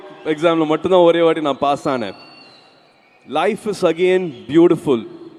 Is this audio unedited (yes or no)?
yes